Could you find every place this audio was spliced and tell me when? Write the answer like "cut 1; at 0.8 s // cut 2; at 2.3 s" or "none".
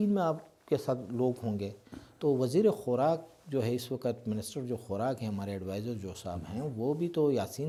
none

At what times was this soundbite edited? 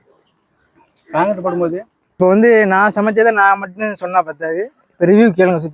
cut 1; at 2.2 s

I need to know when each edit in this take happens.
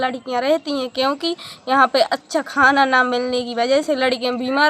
none

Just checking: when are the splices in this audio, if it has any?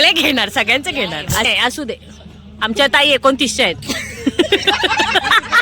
cut 1; at 1.5 s

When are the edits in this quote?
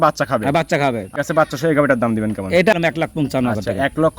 cut 1; at 1.1 s // cut 2; at 2.7 s

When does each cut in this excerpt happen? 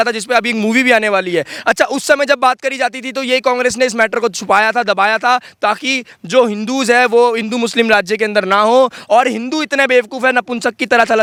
none

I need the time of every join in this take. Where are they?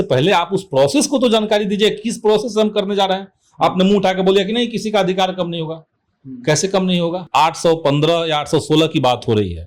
cut 1; at 7.2 s

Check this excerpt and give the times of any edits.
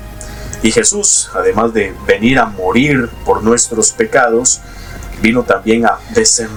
none

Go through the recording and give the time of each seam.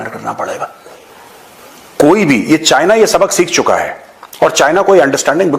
none

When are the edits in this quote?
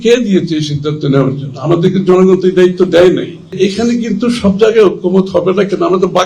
cut 1; at 3.6 s

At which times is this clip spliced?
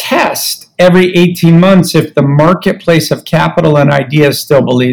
none

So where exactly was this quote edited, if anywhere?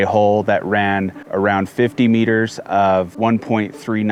none

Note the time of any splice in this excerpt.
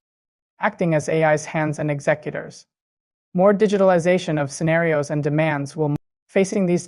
cut 1; at 5.9 s

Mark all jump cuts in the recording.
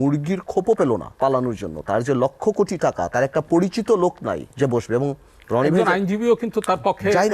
cut 1; at 1.1 s // cut 2; at 4.5 s

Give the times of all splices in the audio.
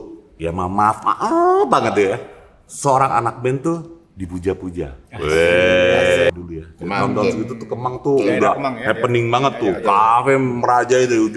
cut 1; at 6.3 s

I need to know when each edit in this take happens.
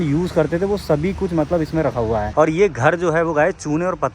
cut 1; at 2.3 s

